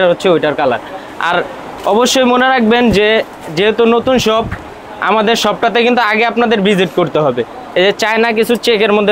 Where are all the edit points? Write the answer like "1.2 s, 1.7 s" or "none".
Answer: none